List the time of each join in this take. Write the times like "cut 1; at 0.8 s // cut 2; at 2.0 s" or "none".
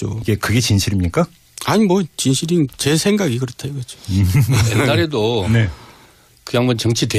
none